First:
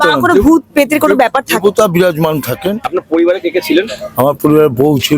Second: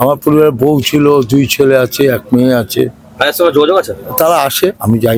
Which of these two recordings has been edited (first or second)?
first